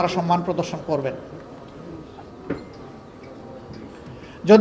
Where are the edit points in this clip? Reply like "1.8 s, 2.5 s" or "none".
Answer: none